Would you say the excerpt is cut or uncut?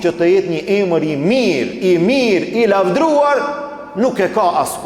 uncut